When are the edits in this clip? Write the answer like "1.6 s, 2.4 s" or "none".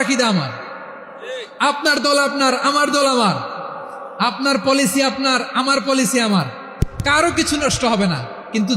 none